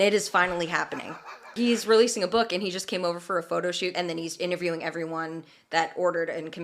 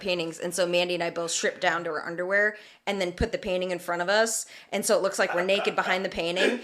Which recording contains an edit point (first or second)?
first